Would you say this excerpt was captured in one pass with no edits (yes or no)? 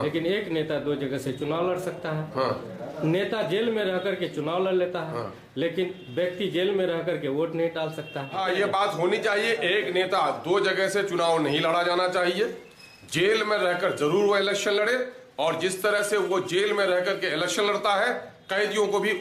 no